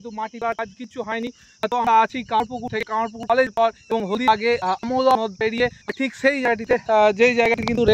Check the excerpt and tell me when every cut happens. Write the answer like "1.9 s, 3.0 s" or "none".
none